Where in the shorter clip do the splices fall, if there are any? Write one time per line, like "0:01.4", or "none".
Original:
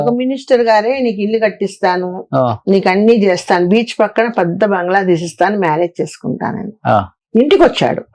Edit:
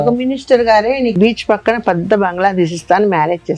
0:01.2